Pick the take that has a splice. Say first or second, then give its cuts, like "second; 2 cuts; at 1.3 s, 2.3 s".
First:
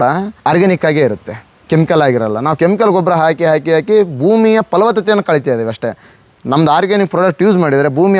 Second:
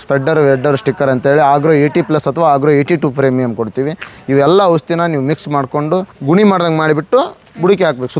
second; 1 cut; at 6.1 s